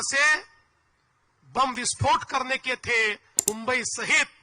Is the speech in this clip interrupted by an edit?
yes; 1 cut; at 3.4 s

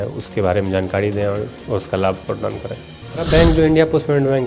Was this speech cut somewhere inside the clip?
yes; 1 cut; at 3.3 s

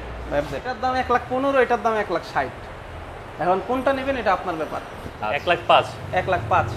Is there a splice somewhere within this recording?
yes; 2 cuts; at 0.8 s, 5.3 s

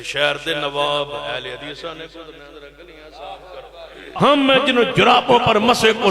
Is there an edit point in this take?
yes; 1 cut; at 4.1 s

